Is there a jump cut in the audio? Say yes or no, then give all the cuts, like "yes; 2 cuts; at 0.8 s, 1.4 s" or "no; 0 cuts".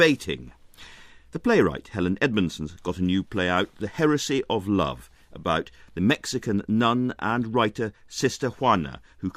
no; 0 cuts